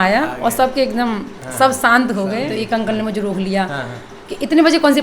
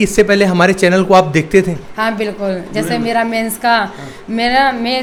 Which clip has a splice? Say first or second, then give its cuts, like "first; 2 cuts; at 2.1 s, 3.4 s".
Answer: first; 1 cut; at 2.5 s